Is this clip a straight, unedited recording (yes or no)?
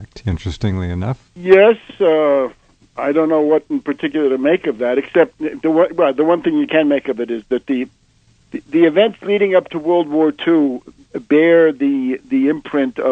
no